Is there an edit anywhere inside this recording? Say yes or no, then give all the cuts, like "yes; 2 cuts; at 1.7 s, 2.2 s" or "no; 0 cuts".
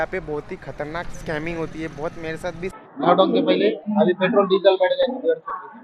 yes; 1 cut; at 2.9 s